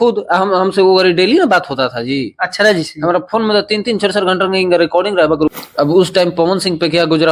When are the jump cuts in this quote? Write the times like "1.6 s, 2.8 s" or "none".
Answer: 5.6 s